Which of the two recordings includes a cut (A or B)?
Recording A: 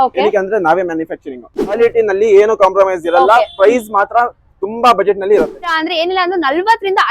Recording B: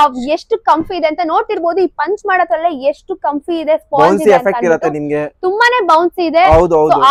A